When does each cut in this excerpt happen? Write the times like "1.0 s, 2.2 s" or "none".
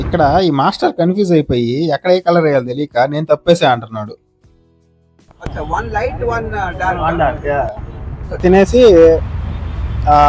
8.4 s